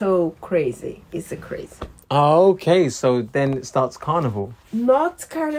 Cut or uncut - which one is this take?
uncut